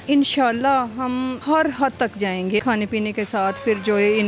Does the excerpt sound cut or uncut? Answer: cut